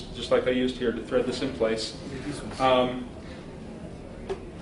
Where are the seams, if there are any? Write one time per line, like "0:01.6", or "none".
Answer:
0:02.8